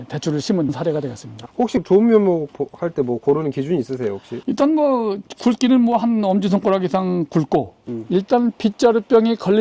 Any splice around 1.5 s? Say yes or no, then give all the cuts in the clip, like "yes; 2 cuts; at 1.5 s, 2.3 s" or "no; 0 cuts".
yes; 2 cuts; at 1.5 s, 7.9 s